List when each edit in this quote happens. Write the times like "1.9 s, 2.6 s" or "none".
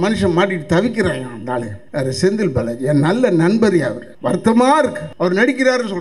1.8 s, 4.1 s, 5.0 s